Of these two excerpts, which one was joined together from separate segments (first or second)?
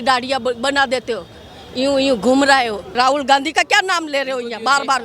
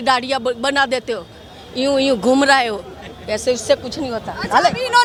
first